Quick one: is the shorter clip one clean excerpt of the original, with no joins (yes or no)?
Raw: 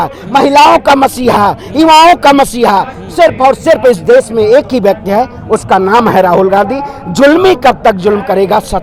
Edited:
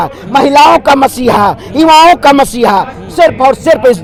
yes